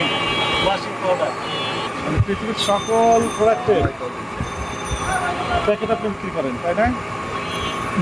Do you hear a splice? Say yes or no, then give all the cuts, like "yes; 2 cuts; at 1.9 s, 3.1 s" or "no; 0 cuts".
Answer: yes; 1 cut; at 1.8 s